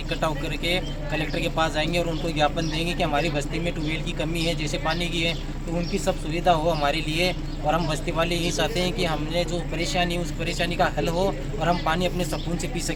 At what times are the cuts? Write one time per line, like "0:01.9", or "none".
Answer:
none